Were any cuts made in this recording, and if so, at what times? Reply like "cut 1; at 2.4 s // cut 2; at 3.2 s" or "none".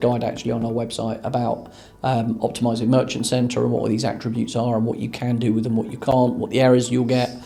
none

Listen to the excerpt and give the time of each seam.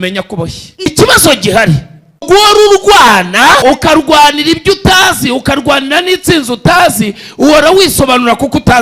cut 1; at 0.9 s // cut 2; at 2.2 s // cut 3; at 3.6 s

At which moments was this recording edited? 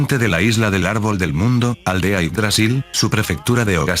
cut 1; at 1.8 s

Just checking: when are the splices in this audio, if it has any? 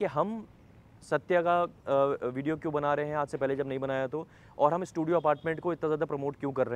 none

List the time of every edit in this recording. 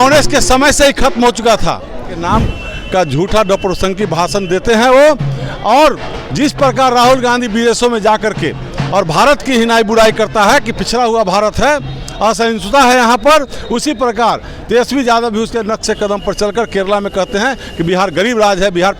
cut 1; at 2.2 s

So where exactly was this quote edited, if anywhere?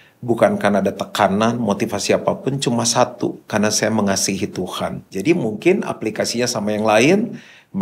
cut 1; at 5.0 s

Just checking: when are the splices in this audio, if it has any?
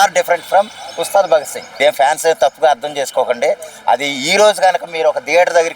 cut 1; at 1.6 s

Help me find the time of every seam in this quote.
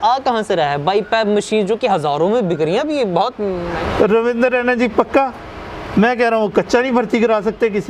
cut 1; at 3.7 s

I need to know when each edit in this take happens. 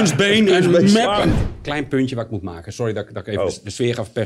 cut 1; at 1.3 s

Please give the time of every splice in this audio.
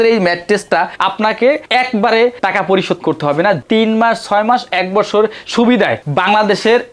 cut 1; at 0.9 s // cut 2; at 3.6 s

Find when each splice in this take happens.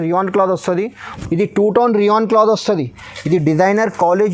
cut 1; at 1.1 s

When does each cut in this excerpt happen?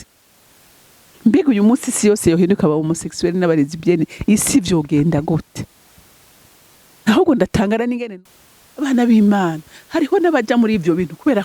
cut 1; at 8.1 s

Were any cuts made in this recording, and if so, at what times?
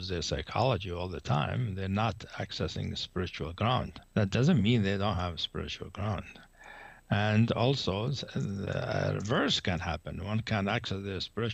cut 1; at 4.0 s

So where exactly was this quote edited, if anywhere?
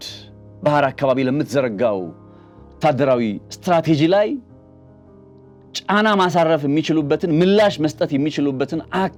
none

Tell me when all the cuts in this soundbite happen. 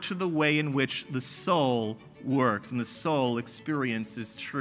none

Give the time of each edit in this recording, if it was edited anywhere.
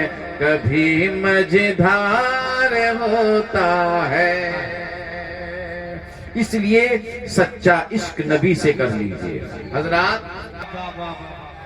cut 1; at 10.6 s

